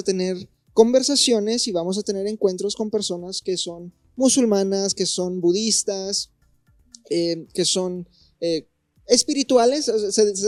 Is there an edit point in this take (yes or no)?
no